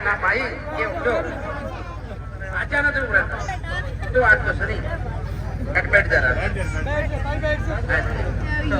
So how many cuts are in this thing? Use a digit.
0